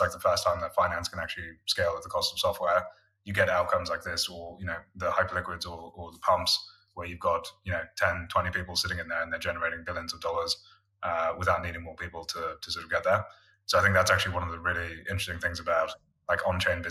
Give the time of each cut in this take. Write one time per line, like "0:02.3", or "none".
none